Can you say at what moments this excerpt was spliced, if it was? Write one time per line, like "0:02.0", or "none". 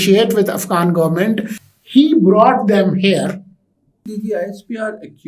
0:01.6
0:04.1